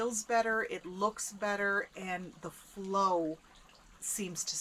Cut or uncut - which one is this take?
uncut